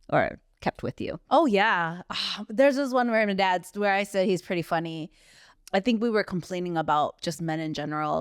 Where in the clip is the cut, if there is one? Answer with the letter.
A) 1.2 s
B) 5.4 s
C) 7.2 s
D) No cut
B